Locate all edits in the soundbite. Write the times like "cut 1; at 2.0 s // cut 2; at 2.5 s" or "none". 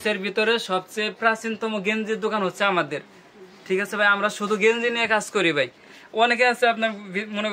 none